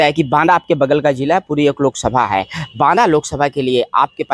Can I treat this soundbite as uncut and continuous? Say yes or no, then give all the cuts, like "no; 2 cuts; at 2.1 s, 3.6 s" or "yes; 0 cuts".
yes; 0 cuts